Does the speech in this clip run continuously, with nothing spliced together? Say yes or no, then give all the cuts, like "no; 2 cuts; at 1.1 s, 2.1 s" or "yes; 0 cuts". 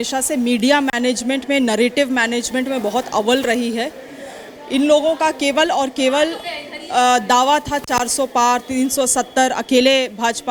yes; 0 cuts